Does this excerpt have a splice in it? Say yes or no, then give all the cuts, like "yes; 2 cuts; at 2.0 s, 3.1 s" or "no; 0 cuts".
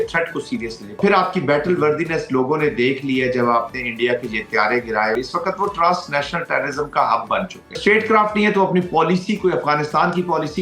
yes; 3 cuts; at 1.0 s, 5.2 s, 7.8 s